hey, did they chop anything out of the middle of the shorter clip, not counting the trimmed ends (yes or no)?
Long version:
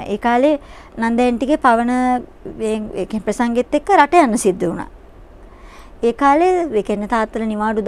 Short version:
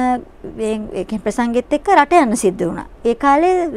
yes